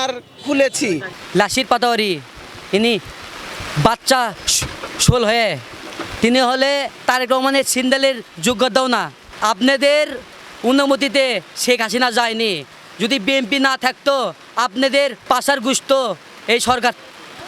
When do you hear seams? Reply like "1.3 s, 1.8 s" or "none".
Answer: 1.1 s, 9.3 s, 15.2 s